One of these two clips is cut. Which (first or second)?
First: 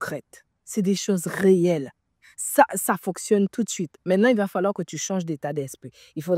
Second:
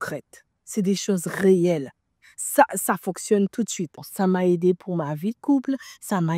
second